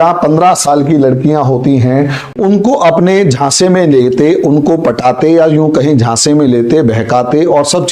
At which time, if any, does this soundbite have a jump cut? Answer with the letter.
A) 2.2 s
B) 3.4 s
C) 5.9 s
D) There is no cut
A